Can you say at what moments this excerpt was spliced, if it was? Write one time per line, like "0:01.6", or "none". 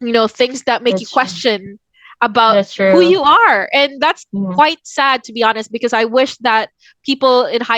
none